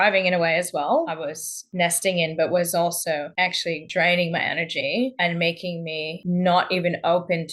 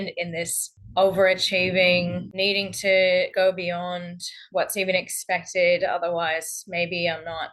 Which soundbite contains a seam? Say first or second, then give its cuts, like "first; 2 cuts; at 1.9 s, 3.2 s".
first; 1 cut; at 1.1 s